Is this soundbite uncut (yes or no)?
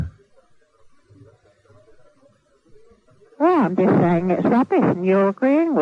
yes